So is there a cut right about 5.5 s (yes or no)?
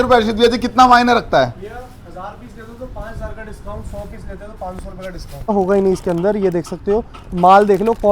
yes